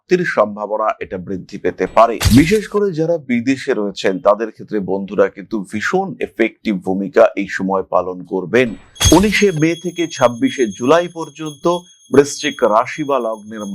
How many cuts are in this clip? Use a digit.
1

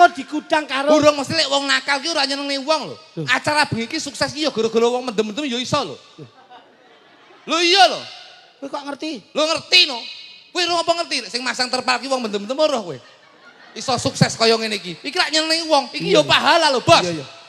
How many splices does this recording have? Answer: 0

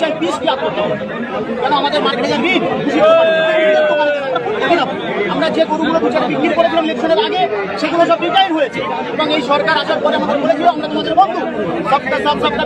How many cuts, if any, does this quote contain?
0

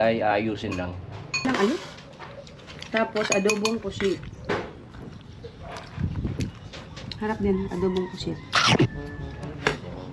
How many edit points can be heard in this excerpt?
1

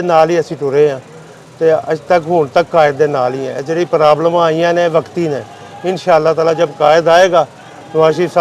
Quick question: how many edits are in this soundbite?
0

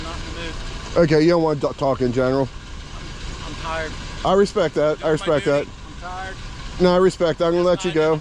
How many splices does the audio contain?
0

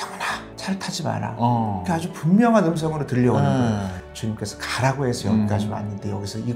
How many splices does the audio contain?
1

